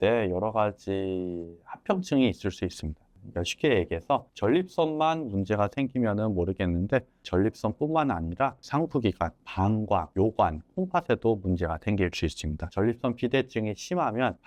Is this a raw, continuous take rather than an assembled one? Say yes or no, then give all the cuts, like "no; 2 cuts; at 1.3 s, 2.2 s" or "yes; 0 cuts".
yes; 0 cuts